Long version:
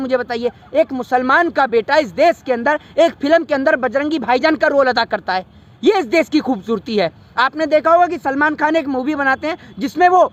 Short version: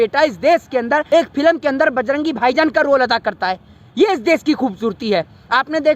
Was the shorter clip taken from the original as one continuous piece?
no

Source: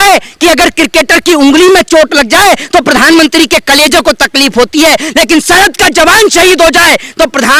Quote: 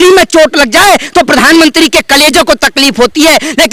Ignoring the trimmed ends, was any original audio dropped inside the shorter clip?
no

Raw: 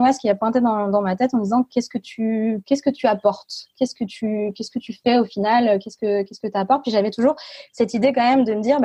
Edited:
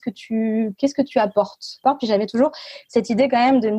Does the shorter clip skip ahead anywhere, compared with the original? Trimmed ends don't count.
yes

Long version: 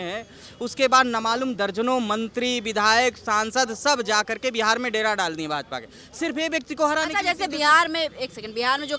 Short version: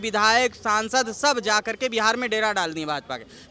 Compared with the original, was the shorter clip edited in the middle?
no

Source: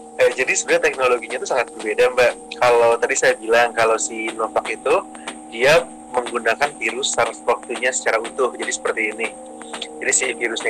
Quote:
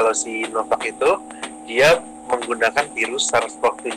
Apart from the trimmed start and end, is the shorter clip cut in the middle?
no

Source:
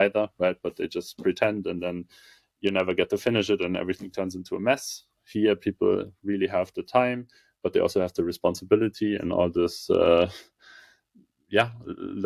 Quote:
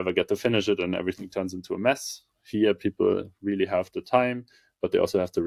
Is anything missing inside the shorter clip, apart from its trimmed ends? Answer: no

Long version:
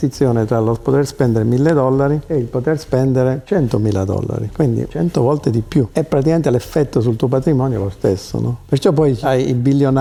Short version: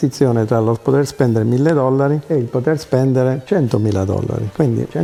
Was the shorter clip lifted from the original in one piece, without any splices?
yes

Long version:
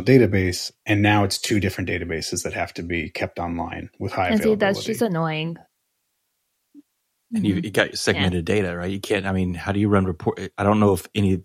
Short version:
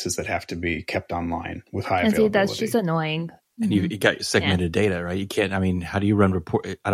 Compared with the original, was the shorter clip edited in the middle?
yes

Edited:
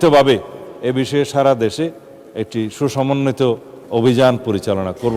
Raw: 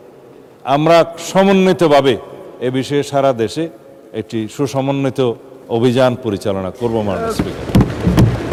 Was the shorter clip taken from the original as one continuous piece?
yes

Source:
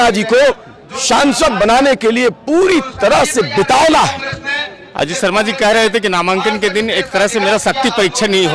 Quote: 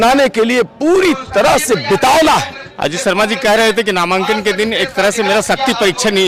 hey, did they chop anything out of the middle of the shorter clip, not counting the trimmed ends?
yes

